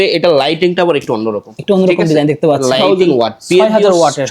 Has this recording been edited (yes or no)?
yes